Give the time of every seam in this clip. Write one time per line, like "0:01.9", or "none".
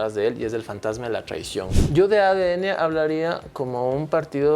0:01.7